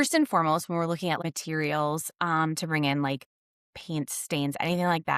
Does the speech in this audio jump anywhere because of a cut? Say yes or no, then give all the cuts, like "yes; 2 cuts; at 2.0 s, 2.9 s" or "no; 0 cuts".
yes; 1 cut; at 1.2 s